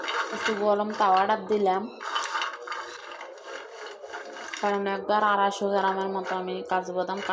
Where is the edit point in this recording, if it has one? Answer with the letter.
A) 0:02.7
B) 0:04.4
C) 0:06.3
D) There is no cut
B